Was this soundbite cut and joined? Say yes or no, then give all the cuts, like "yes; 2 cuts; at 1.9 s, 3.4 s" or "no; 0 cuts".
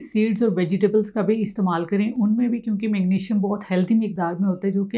no; 0 cuts